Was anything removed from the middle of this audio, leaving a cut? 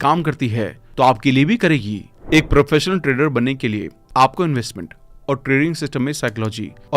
yes; 1 cut; at 2.1 s

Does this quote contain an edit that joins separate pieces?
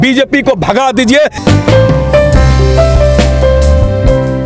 yes; 1 cut; at 1.4 s

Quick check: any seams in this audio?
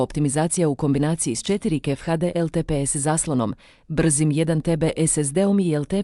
no; 0 cuts

